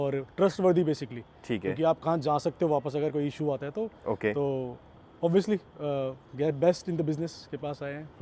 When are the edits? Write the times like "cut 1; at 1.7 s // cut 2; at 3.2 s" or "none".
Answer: none